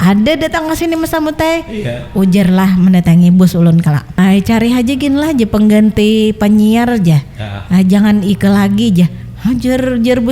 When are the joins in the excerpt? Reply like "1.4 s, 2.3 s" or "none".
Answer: 4.1 s